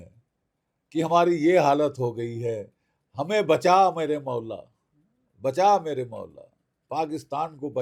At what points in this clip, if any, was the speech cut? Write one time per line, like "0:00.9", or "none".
none